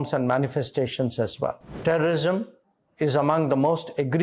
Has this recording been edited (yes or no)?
yes